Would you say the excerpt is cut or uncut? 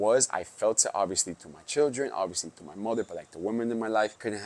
uncut